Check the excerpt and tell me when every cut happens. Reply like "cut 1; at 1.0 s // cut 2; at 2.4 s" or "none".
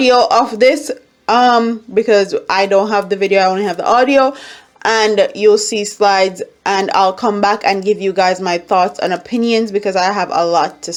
none